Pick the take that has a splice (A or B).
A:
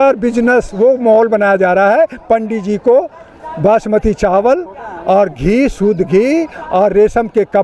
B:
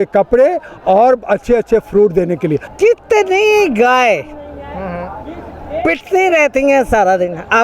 B